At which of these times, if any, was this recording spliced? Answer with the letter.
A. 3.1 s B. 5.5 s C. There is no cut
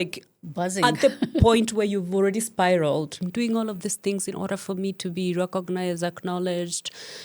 A